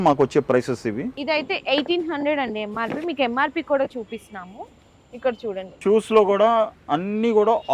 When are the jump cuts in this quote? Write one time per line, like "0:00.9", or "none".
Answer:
0:01.1
0:05.7